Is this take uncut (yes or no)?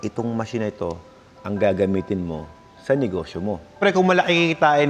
no